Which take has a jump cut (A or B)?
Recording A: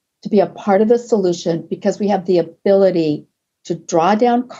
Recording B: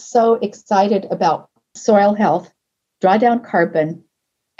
B